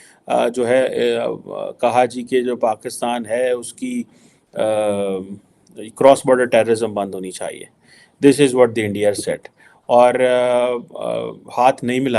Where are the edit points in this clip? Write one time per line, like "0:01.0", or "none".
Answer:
none